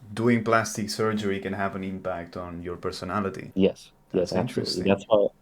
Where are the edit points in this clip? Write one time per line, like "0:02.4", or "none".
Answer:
0:03.4